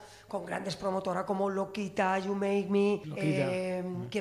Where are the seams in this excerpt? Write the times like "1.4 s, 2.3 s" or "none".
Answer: 3.1 s